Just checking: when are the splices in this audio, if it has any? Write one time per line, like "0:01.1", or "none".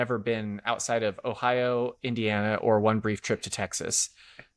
none